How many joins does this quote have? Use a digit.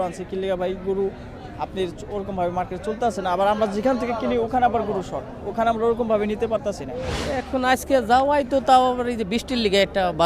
1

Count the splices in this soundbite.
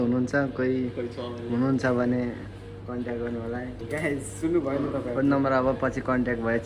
1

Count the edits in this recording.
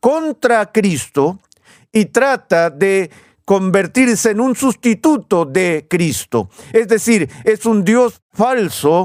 0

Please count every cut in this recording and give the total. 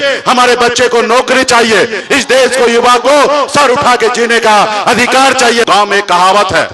2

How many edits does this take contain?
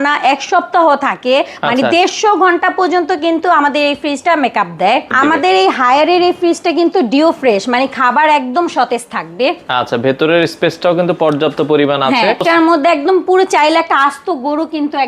2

